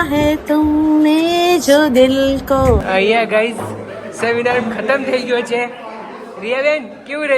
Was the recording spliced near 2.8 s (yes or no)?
yes